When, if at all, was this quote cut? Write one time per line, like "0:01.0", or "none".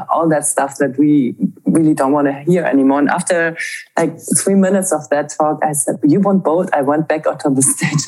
0:06.0